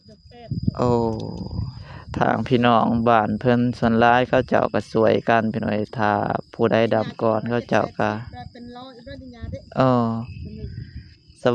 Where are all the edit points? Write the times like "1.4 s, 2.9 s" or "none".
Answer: 2.0 s